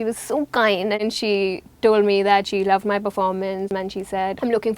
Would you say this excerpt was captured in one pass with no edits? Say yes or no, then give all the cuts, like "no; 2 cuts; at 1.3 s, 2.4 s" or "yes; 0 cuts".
no; 2 cuts; at 1.0 s, 3.8 s